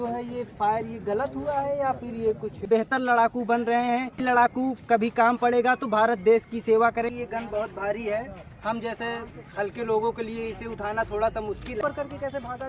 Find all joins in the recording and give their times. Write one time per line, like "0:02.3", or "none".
0:02.6
0:04.2
0:07.1
0:11.8